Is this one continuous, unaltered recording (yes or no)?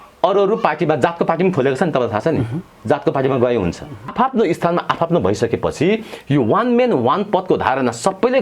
no